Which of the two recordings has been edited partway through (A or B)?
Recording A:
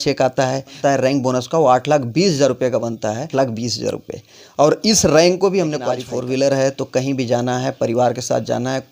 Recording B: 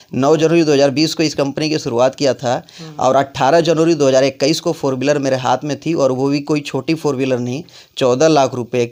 A